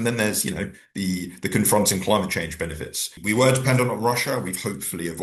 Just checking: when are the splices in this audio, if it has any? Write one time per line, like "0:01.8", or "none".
0:03.1

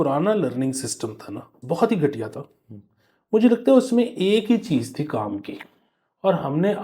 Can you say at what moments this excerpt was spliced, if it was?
0:01.5

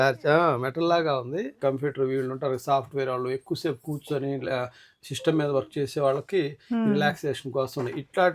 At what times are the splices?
0:01.5

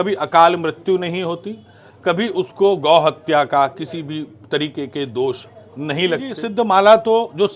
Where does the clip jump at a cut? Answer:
0:06.3

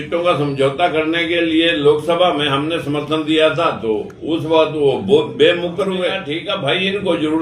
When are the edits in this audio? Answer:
0:06.3

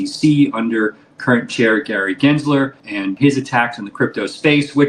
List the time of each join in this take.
0:03.0

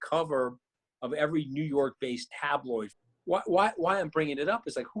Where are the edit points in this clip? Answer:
0:02.9

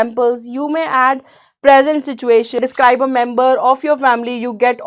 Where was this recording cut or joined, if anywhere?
0:02.5

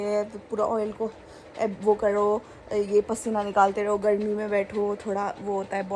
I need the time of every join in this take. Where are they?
none

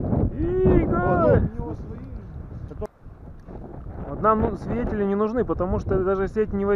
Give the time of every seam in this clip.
0:02.9

